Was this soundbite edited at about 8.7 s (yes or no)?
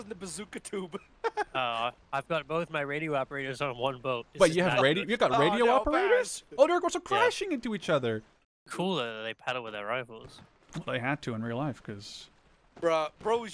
yes